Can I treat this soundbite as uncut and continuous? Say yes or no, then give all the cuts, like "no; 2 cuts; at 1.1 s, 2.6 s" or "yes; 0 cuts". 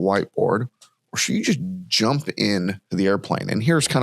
no; 1 cut; at 2.9 s